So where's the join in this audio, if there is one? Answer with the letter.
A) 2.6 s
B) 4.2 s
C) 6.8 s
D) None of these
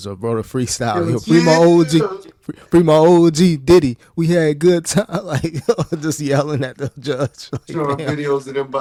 D